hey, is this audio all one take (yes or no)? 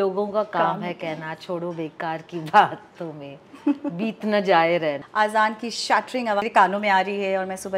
no